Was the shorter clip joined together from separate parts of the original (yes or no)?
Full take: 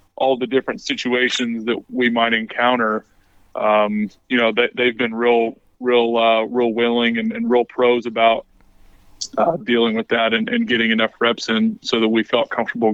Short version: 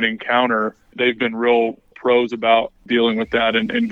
yes